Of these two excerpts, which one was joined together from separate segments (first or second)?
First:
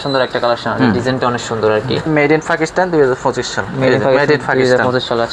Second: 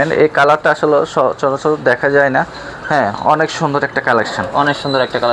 first